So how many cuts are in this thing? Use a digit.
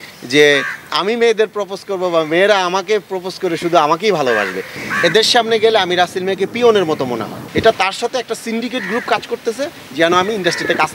2